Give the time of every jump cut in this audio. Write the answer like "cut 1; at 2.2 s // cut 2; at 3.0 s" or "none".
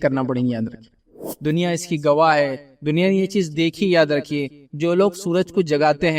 cut 1; at 1.1 s